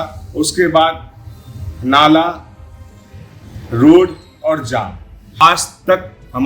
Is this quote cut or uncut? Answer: cut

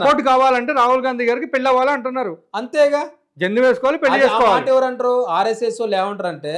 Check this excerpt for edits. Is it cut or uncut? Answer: uncut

